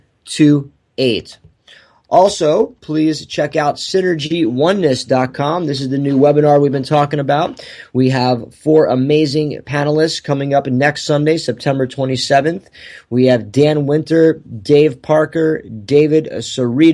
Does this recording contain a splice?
no; 0 cuts

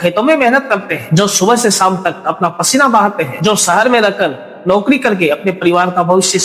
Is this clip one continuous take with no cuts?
yes; 0 cuts

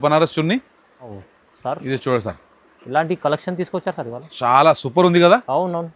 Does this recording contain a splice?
yes; 1 cut; at 1.1 s

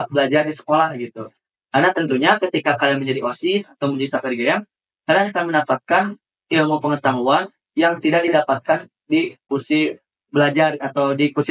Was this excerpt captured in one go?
no; 1 cut; at 9.4 s

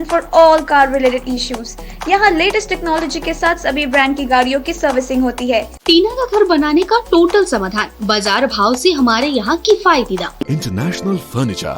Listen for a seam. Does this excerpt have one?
yes; 2 cuts; at 5.7 s, 10.5 s

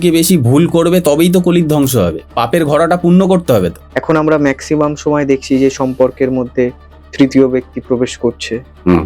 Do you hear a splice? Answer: yes; 1 cut; at 3.8 s

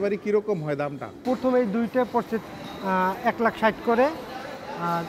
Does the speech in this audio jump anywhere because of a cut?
yes; 1 cut; at 1.1 s

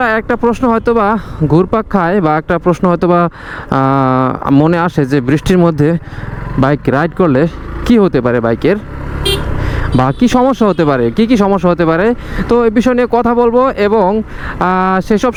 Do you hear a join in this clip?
no; 0 cuts

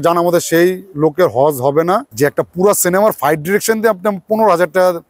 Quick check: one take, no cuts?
no; 1 cut; at 2.1 s

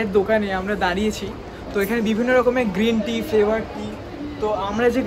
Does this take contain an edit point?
no; 0 cuts

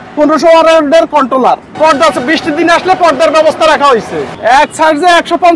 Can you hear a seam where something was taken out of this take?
yes; 2 cuts; at 1.7 s, 4.3 s

